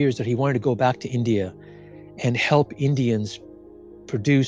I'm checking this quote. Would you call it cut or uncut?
uncut